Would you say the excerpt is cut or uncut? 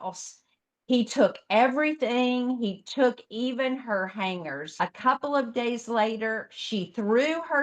cut